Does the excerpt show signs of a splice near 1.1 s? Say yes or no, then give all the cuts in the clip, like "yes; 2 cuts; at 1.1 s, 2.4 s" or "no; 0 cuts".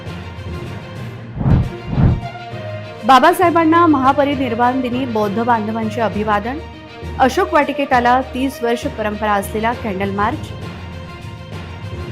yes; 1 cut; at 1.1 s